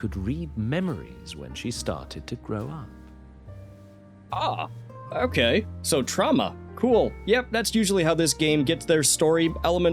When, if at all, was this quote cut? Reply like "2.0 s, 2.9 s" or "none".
4.3 s